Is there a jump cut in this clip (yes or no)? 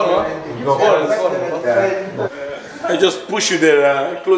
yes